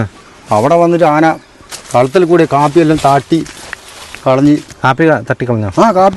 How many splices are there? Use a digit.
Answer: 1